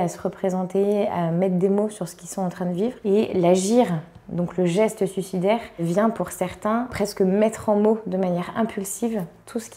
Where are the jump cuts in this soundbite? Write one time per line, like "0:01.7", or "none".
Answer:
none